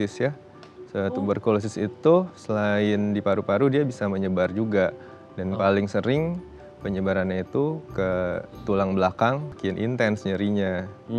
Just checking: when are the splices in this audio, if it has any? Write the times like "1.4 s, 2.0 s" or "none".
9.5 s